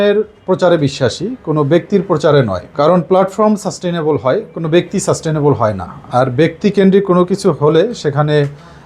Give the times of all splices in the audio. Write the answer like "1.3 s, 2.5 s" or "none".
none